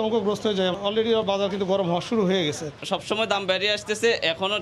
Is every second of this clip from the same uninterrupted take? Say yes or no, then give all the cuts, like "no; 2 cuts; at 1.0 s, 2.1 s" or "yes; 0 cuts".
no; 1 cut; at 2.7 s